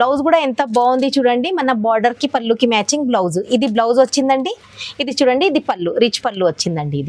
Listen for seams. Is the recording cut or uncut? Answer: uncut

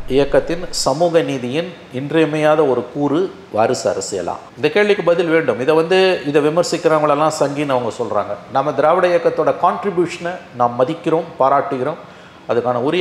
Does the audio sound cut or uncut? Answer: uncut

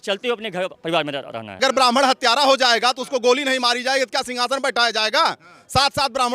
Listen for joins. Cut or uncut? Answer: cut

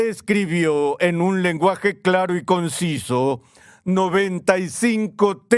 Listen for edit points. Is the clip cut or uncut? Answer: uncut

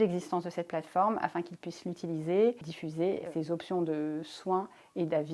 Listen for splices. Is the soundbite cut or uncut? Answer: cut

